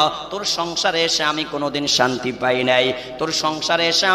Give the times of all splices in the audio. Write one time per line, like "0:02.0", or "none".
none